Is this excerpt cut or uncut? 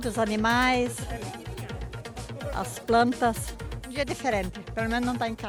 uncut